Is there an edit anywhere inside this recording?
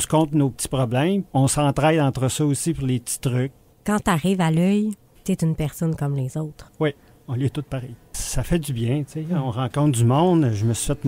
yes; 3 cuts; at 1.3 s, 3.7 s, 8.1 s

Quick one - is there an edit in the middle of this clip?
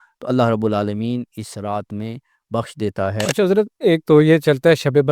yes; 1 cut; at 3.3 s

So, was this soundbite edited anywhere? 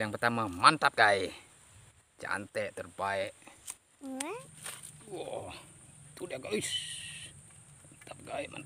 yes; 1 cut; at 4.4 s

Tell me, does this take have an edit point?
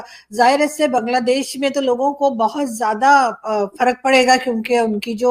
no; 0 cuts

